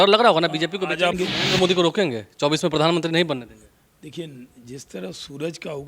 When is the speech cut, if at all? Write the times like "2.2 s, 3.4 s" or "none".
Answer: 1.1 s